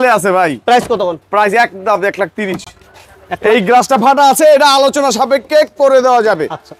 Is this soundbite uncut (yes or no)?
yes